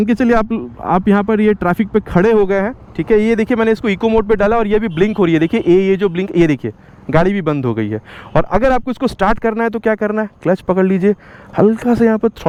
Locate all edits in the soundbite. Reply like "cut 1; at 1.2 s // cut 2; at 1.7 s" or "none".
none